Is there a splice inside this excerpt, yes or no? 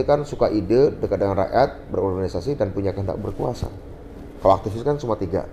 no